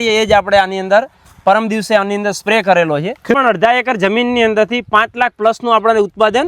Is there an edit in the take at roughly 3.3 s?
yes; 1 cut; at 3.3 s

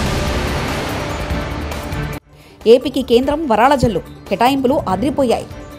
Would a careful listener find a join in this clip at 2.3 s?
yes; 1 cut; at 2.3 s

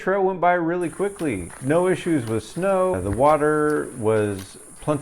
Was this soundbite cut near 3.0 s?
yes; 2 cuts; at 1.5 s, 3.0 s

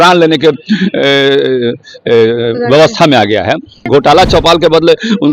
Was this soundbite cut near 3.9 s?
yes; 1 cut; at 3.9 s

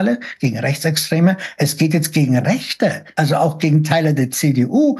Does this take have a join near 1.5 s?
no; 1 cut; at 3.0 s

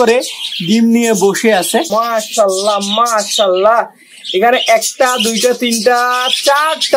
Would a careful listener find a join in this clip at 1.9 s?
yes; 1 cut; at 1.9 s

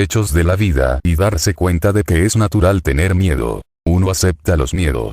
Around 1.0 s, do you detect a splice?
no; 1 cut; at 3.7 s

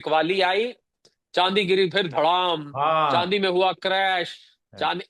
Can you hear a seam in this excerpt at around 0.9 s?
yes; 1 cut; at 0.9 s

